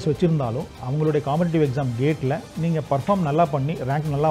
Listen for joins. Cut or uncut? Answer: uncut